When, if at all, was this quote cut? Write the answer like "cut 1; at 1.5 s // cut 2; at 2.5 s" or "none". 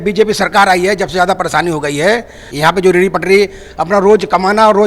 cut 1; at 2.4 s